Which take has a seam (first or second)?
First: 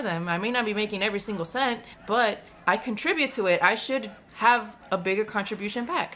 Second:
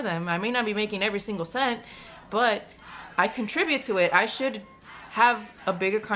first